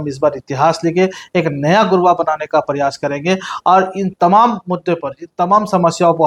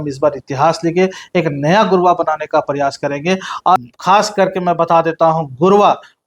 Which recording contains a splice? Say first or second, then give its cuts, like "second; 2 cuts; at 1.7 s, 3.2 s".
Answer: second; 1 cut; at 3.8 s